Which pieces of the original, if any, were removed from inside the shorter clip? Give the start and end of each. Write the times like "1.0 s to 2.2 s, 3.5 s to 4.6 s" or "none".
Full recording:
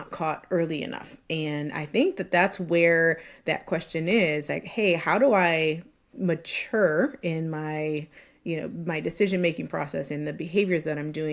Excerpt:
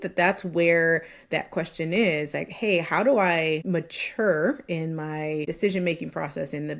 5.8 s to 6.2 s, 8.0 s to 9.0 s